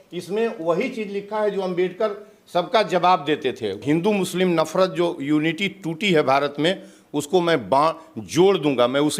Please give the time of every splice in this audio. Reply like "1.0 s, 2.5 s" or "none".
3.8 s

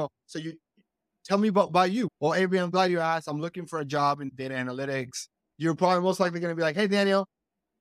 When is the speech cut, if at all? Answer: 2.1 s, 4.3 s, 5.5 s

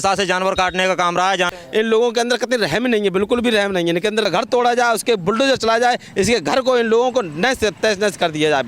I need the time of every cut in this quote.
1.5 s, 4.3 s

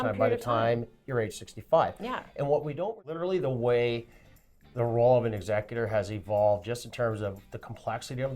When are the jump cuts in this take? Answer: 2.7 s

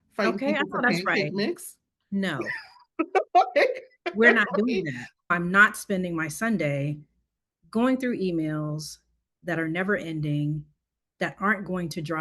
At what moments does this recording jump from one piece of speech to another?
5.3 s

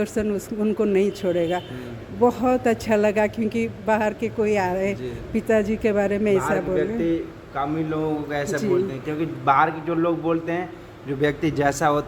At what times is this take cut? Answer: none

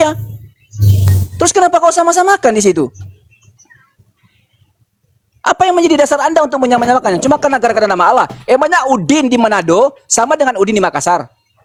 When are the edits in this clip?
none

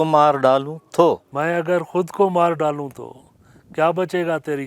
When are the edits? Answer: 1.3 s

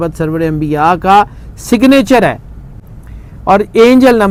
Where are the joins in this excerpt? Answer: none

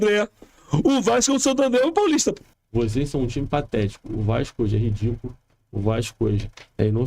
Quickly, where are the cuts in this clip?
2.5 s

